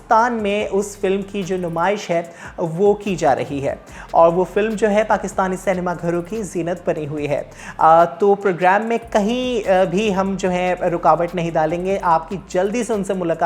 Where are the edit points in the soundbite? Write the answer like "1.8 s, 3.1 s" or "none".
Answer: none